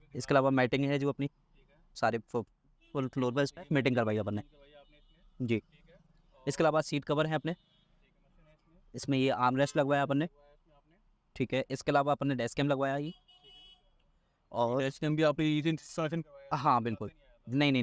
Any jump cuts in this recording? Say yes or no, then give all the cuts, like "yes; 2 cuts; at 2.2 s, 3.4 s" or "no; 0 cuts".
yes; 2 cuts; at 1.9 s, 8.3 s